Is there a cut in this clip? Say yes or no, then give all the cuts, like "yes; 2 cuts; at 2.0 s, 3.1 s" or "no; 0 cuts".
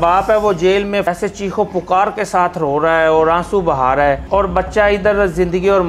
yes; 2 cuts; at 1.0 s, 4.2 s